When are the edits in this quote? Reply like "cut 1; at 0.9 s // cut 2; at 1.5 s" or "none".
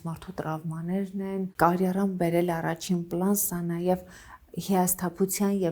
cut 1; at 1.5 s